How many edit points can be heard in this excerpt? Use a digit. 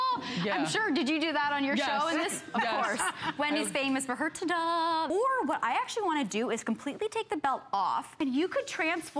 2